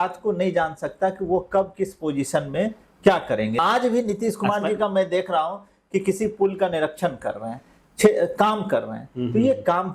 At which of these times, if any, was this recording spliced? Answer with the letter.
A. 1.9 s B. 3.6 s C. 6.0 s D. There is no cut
B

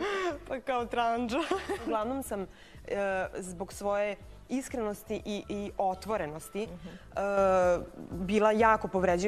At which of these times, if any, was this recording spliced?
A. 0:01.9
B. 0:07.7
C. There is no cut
A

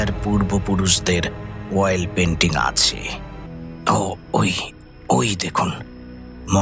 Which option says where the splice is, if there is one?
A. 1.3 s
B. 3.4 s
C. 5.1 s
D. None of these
B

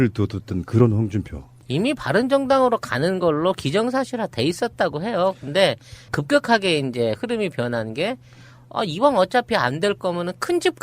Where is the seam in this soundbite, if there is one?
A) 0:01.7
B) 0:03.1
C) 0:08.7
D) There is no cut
C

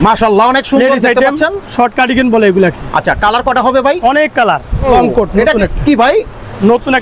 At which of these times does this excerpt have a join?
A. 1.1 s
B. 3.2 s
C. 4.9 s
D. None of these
C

